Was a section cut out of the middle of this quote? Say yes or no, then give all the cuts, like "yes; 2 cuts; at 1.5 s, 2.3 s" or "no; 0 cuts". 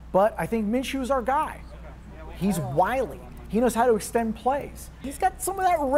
yes; 1 cut; at 5.0 s